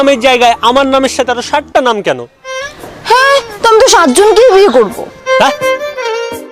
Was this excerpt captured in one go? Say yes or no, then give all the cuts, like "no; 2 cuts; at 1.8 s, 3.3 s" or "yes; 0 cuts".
no; 1 cut; at 5.6 s